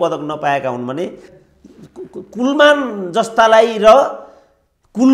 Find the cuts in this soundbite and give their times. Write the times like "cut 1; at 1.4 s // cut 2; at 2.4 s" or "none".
cut 1; at 1.3 s